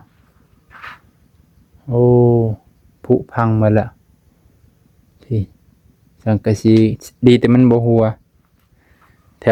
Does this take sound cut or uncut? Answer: uncut